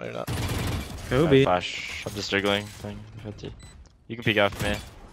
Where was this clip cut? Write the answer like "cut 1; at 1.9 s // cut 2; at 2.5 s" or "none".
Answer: none